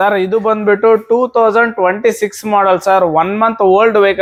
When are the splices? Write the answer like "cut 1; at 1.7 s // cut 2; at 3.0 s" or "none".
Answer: none